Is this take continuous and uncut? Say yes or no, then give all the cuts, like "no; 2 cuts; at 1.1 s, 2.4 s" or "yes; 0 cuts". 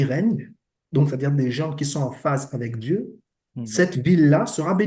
yes; 0 cuts